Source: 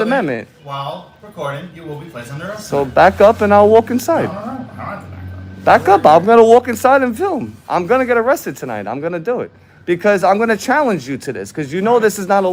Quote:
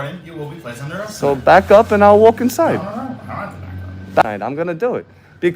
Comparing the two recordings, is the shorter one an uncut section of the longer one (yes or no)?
no